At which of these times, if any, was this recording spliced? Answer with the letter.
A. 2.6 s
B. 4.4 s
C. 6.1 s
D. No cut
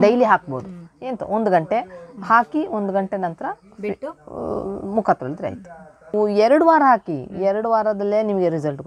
C